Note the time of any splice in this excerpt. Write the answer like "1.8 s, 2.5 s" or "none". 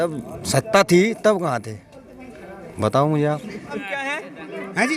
3.8 s